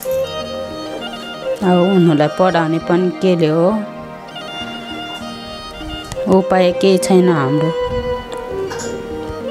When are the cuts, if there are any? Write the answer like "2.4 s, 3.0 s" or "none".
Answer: 1.0 s, 3.9 s, 5.8 s, 7.6 s